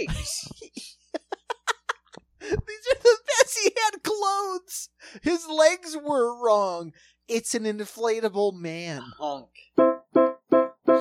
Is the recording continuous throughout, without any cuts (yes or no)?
no